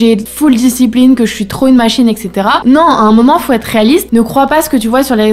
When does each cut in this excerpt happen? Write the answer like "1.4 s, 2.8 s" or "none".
4.1 s